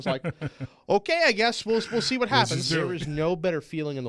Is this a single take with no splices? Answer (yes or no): no